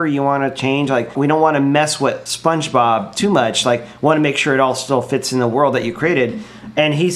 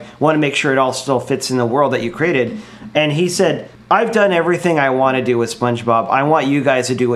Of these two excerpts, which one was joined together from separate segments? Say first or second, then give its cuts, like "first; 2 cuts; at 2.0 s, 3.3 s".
first; 1 cut; at 1.1 s